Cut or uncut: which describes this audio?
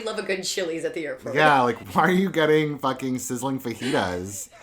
cut